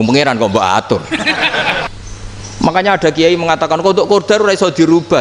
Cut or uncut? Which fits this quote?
cut